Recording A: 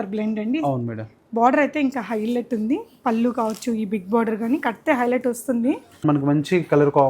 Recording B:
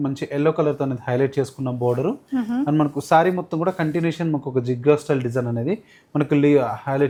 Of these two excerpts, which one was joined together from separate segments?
A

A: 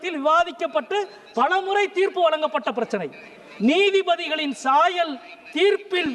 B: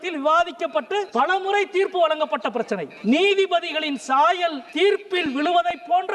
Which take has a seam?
B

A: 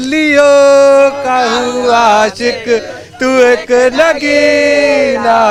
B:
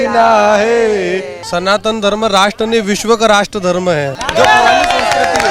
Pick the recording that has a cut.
B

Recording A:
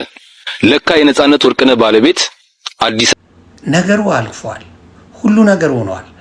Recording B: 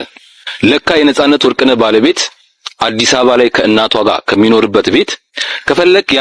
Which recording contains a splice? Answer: A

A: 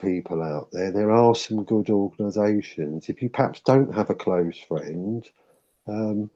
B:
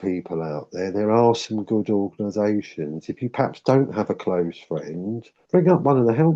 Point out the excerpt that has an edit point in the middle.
B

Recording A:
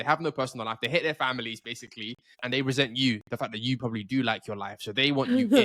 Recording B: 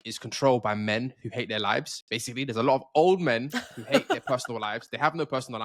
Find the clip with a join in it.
A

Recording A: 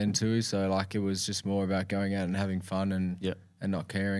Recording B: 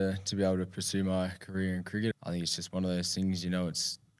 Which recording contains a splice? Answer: B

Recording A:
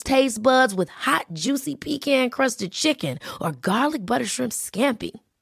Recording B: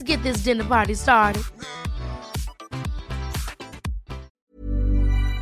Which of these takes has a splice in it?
B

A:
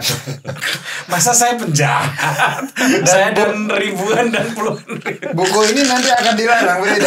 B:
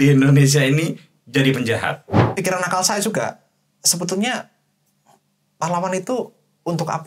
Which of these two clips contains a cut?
B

